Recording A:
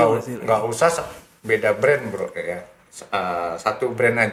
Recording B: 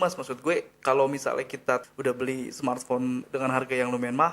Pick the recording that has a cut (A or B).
B